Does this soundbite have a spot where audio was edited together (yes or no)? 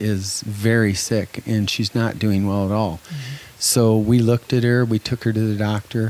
no